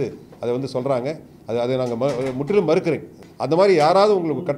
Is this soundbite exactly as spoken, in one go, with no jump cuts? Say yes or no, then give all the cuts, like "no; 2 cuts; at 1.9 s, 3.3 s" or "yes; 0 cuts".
no; 1 cut; at 3.3 s